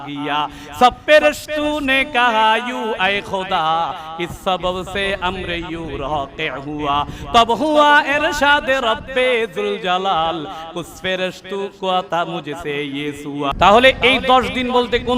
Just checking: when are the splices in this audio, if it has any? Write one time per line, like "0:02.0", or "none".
0:13.5

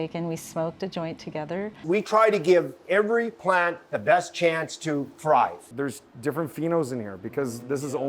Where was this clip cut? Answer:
0:01.8
0:05.7

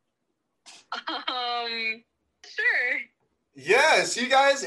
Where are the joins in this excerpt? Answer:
0:02.5

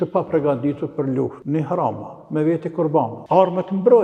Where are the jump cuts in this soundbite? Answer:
0:01.4
0:03.2

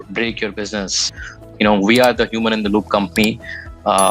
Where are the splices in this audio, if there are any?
0:01.1

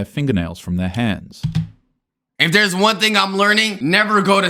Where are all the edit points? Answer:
0:02.3

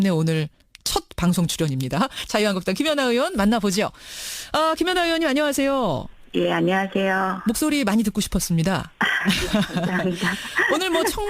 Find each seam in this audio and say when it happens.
0:06.0

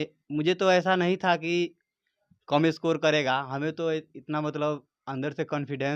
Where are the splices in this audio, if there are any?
none

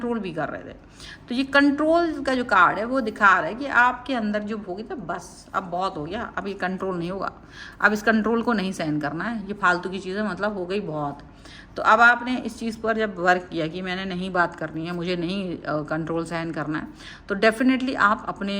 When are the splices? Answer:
none

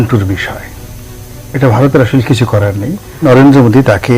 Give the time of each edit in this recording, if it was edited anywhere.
0:03.2

